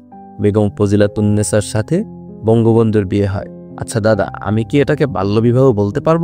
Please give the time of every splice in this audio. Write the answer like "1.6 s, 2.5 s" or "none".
none